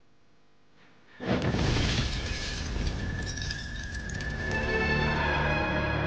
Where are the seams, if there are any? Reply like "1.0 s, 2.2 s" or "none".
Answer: none